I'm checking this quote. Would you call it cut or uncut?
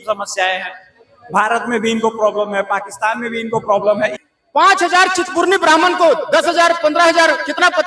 cut